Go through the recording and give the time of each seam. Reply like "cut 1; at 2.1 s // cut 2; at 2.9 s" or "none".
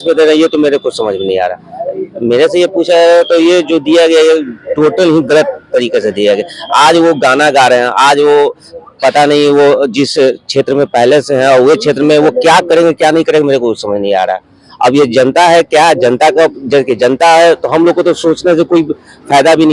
none